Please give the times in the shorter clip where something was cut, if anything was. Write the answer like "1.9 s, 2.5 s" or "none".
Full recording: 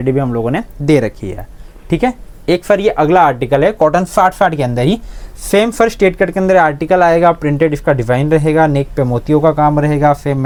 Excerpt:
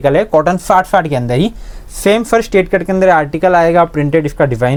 none